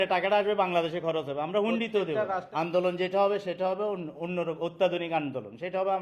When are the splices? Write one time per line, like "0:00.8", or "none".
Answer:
0:02.4